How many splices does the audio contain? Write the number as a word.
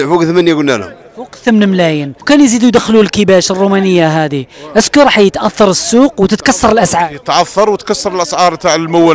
one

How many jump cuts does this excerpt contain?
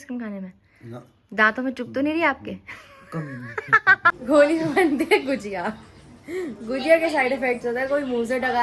one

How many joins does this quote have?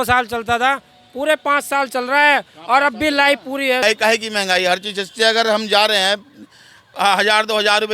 one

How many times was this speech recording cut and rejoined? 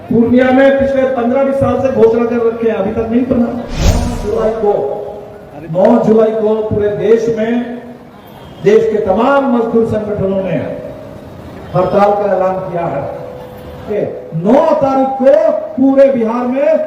two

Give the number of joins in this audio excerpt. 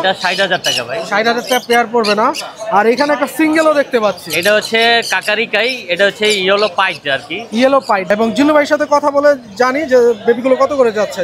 one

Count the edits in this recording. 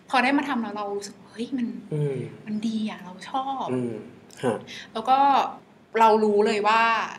one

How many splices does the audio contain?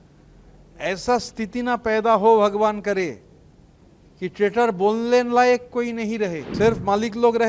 one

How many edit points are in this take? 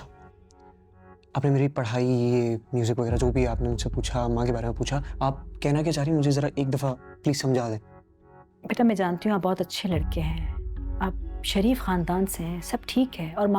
zero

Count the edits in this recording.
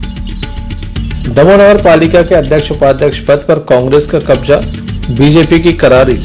one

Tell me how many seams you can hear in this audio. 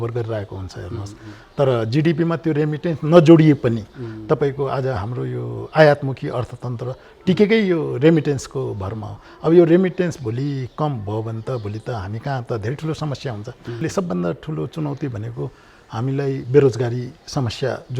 one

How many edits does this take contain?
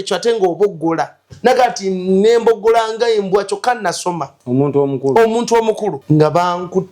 one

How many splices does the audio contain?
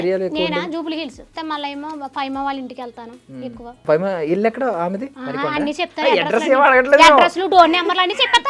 three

